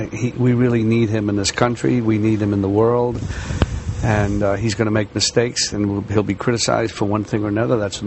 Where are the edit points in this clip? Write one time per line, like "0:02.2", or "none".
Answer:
0:02.3